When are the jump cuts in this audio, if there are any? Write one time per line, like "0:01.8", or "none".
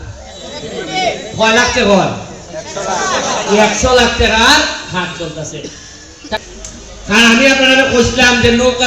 0:06.4